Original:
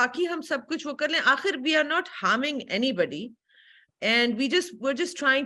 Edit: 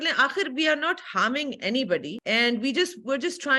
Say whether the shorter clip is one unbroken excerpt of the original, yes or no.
no